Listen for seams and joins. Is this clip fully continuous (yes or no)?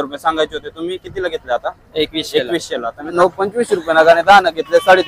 no